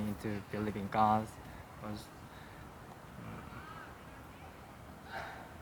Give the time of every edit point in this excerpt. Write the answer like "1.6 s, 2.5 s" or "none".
none

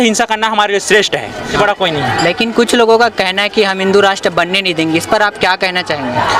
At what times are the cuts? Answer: 1.4 s

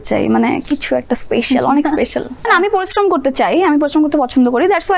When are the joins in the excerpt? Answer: 2.5 s

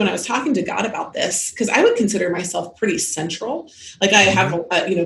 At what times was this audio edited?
none

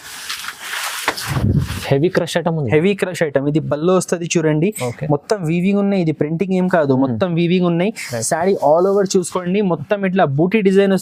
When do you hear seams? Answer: none

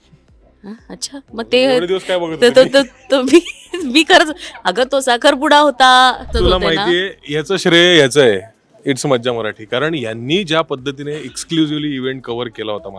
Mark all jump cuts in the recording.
6.3 s

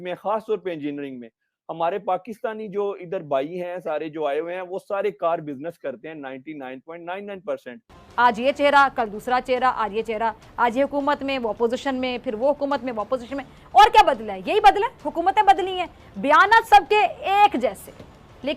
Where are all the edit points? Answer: 8.0 s

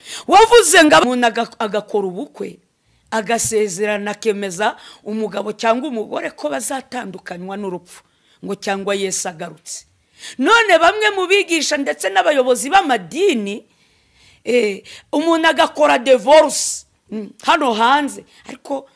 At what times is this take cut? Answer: 1.0 s

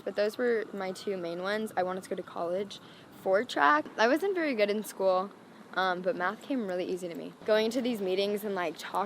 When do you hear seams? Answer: 3.9 s, 7.3 s

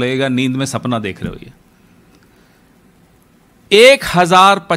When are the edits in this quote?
none

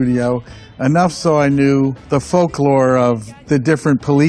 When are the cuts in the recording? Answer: none

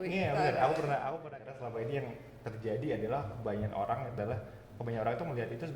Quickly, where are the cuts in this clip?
1.3 s

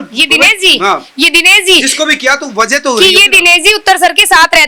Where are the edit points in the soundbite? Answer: none

